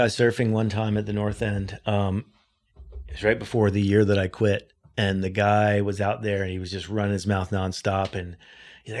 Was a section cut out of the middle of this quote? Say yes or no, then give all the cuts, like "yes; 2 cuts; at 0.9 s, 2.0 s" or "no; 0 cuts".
no; 0 cuts